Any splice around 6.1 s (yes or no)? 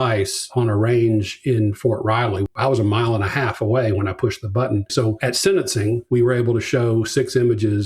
no